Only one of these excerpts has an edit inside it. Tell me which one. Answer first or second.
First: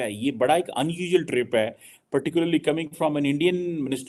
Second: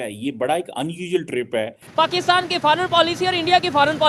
second